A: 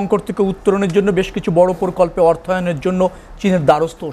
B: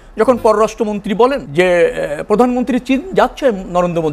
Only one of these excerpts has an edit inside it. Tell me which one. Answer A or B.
B